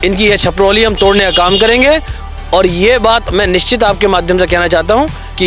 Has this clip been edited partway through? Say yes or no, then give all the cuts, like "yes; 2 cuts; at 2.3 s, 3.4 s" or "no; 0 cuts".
no; 0 cuts